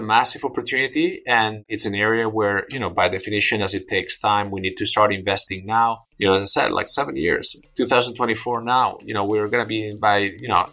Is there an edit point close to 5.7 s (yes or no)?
no